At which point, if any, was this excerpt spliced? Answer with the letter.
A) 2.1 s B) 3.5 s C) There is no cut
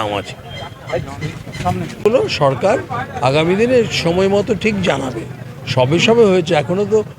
A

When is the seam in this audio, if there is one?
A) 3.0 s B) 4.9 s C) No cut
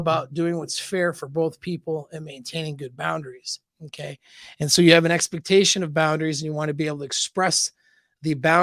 C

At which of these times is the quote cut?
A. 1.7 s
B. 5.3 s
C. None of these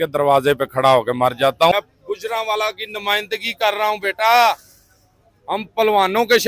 A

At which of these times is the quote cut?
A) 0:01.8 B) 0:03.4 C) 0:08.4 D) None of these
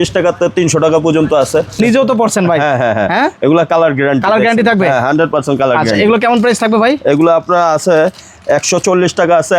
A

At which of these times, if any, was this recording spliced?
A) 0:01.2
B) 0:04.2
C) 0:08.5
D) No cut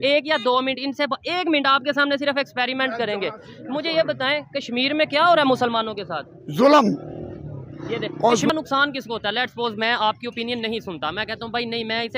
C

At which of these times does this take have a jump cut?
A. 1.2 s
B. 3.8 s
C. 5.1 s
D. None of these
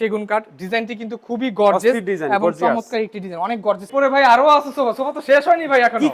B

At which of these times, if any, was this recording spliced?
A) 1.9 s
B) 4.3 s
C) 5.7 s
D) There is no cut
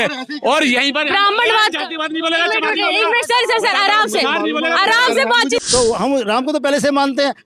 C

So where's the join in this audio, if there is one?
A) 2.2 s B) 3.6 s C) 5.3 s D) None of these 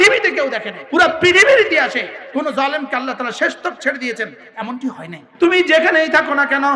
C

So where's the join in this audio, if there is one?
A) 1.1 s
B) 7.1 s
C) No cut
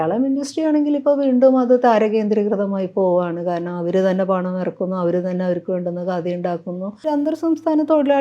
B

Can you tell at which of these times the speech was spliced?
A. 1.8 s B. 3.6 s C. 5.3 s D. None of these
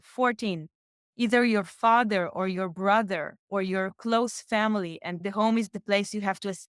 C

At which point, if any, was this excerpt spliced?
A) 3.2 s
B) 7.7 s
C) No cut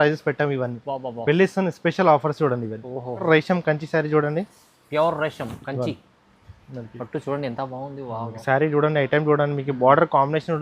A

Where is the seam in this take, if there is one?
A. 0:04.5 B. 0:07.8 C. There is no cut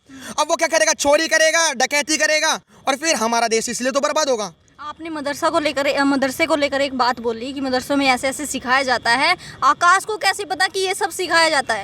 C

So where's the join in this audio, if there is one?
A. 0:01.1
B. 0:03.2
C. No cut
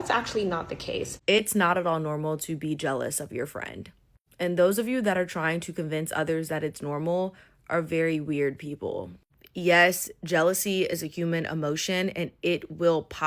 A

